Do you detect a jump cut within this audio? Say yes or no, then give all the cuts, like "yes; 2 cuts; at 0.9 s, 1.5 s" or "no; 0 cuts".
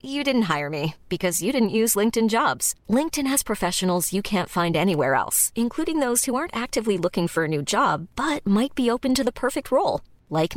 no; 0 cuts